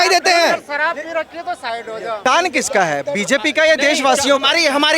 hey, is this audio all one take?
no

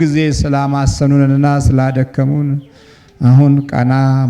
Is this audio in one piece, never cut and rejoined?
yes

